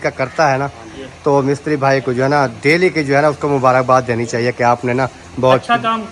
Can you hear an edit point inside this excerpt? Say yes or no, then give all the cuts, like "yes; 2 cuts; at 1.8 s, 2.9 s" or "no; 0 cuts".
no; 0 cuts